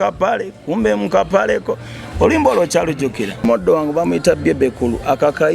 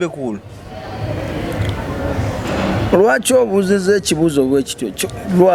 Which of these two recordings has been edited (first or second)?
first